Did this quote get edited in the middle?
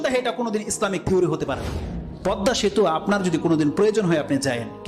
yes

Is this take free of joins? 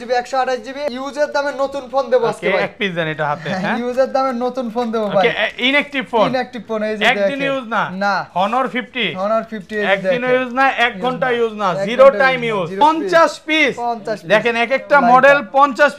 no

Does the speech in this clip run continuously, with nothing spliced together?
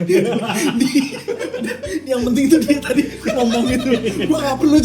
yes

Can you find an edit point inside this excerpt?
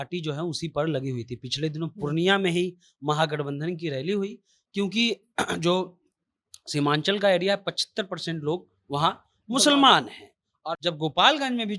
yes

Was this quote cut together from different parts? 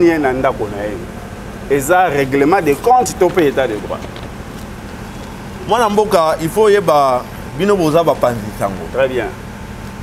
no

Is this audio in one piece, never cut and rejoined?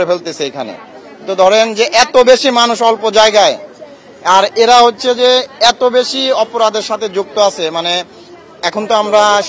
yes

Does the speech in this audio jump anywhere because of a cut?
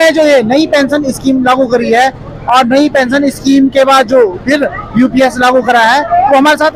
no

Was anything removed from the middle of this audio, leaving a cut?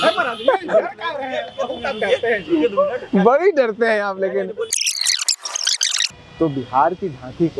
no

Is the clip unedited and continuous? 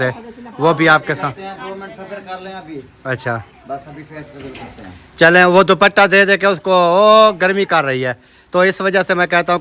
yes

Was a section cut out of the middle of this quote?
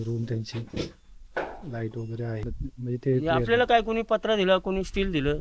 yes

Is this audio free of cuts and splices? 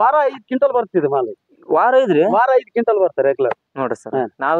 yes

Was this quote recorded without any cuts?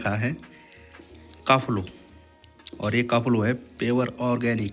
yes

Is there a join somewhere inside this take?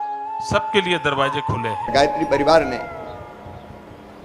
yes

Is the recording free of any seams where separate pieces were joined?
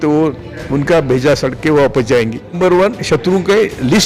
no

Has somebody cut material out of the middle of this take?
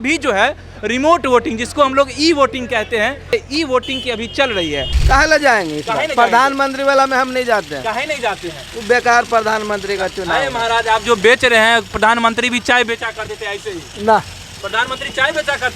yes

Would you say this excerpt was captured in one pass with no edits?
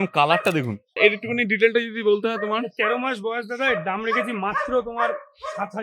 no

